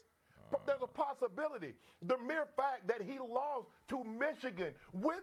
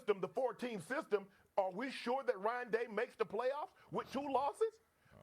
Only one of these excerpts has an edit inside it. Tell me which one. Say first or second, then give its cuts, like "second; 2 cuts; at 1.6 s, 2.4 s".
second; 1 cut; at 3.8 s